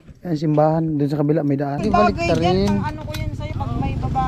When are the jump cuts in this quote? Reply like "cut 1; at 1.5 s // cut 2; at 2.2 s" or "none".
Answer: cut 1; at 1.8 s